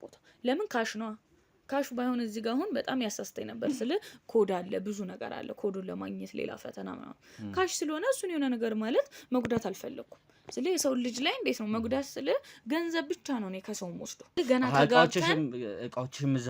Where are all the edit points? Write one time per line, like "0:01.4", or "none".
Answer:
0:14.4